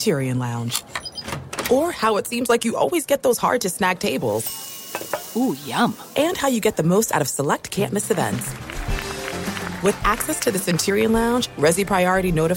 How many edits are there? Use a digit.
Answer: 0